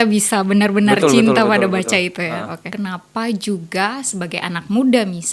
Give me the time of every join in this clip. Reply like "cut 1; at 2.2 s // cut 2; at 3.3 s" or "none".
cut 1; at 2.7 s